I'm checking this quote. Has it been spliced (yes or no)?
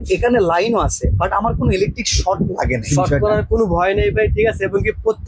yes